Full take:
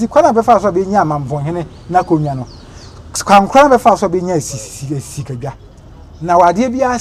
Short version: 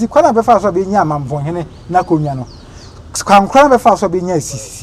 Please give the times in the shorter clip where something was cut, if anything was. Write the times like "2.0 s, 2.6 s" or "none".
none